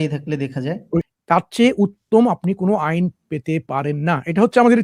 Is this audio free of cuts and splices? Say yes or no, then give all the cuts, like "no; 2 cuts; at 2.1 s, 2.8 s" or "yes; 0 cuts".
no; 1 cut; at 1.0 s